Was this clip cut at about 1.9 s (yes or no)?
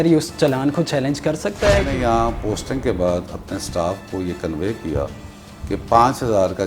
yes